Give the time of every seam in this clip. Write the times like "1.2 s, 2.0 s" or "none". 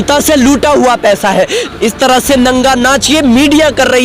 1.6 s